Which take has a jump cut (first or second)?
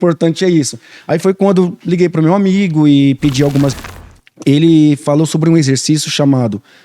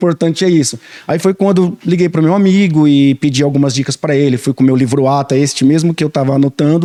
first